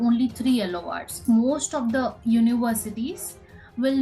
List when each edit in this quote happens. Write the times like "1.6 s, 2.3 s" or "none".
1.2 s